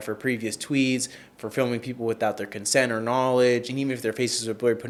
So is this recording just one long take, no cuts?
yes; 0 cuts

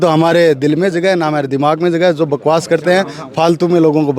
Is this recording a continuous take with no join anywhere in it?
yes; 0 cuts

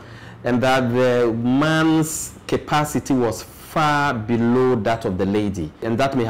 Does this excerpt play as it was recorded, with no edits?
yes; 0 cuts

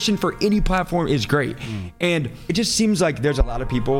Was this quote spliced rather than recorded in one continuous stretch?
yes; 1 cut; at 2.3 s

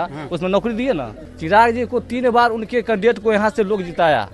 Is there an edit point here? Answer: yes; 1 cut; at 1.2 s

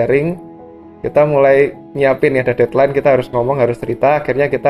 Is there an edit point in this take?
no; 0 cuts

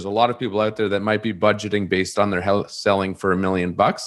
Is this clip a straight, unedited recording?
yes; 0 cuts

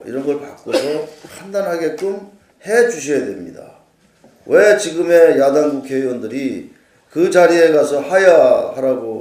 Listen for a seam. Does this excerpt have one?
no; 0 cuts

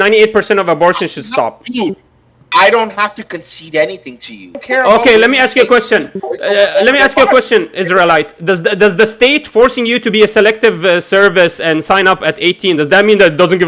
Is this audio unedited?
no; 1 cut; at 4.6 s

